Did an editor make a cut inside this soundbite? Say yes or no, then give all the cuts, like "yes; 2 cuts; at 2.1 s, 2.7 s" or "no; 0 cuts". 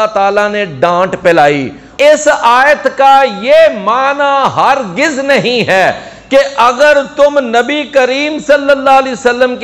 yes; 1 cut; at 2.0 s